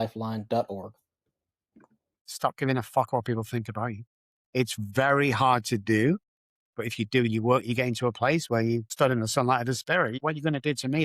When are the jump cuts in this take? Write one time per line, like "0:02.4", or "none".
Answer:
0:02.2
0:08.9
0:10.2